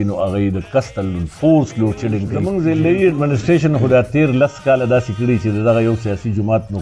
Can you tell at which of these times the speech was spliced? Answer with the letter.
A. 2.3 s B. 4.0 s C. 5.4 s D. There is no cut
A